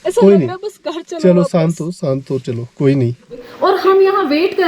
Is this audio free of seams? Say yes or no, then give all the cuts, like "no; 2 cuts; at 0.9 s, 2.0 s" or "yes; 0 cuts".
no; 1 cut; at 3.5 s